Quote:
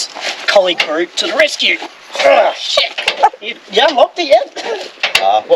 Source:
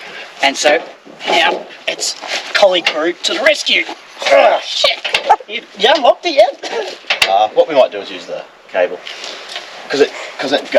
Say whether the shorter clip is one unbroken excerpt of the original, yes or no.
yes